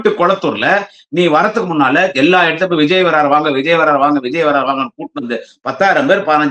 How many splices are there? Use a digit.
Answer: 0